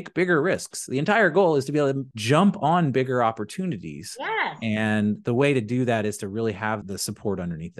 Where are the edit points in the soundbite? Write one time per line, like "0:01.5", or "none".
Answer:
0:02.1
0:06.8